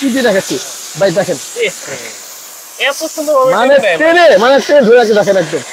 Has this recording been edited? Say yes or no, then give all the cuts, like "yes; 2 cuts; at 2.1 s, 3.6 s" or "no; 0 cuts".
no; 0 cuts